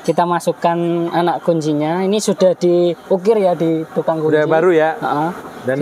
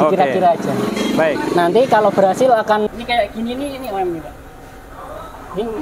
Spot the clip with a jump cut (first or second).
second